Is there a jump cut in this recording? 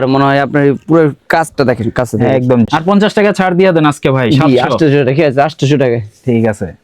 yes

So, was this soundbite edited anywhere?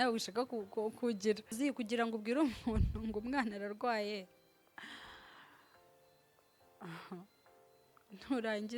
yes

